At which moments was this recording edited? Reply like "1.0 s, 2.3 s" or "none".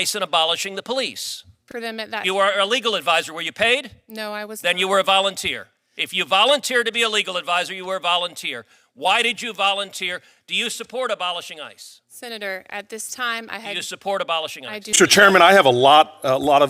1.7 s, 15.0 s